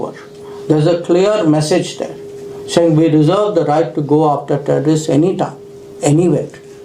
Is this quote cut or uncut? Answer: uncut